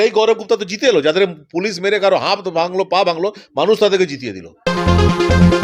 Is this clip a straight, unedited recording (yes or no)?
no